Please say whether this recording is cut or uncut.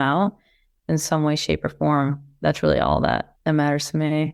cut